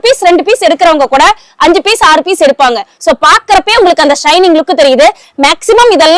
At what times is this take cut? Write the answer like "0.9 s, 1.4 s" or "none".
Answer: 2.9 s